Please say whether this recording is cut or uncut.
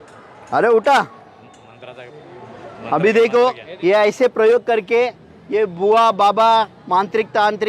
cut